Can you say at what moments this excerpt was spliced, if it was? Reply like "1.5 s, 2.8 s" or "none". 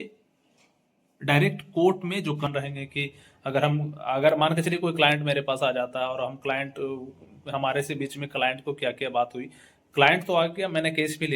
2.5 s